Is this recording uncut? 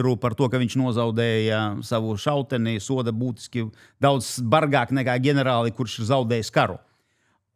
yes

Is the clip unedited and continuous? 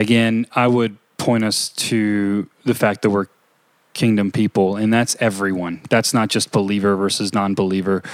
yes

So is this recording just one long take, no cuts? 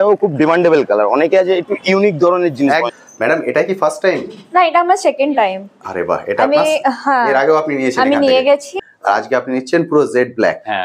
no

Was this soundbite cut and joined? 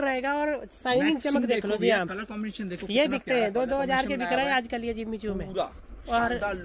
no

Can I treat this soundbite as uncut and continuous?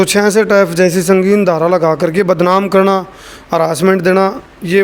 yes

